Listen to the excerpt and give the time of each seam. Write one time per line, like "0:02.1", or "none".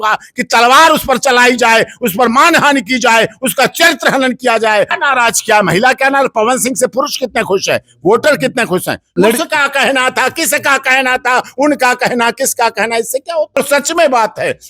0:04.9
0:09.1
0:13.6